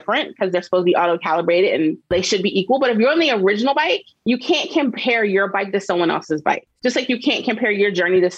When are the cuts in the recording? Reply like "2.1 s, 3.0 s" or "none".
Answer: 2.1 s, 6.5 s